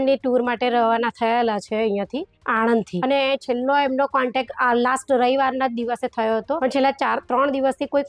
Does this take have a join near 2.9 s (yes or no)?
yes